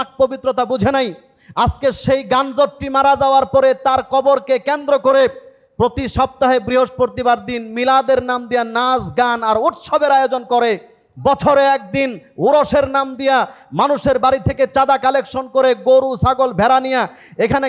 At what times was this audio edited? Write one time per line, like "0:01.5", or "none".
none